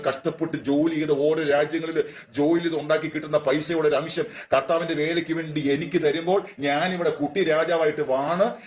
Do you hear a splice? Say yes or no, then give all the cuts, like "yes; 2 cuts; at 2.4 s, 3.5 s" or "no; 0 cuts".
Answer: no; 0 cuts